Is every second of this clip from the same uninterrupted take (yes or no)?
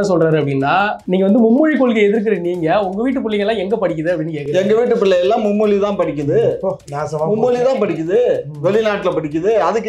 no